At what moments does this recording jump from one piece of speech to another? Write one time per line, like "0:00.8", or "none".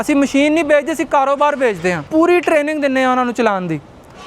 none